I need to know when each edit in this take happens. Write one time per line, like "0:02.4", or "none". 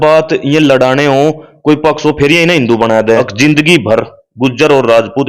0:03.3